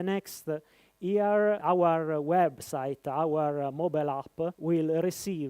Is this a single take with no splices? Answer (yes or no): no